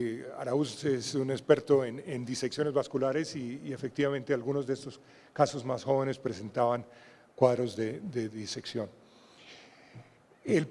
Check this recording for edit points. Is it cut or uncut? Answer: uncut